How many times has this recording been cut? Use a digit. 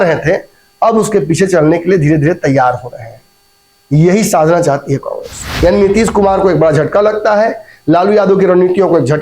1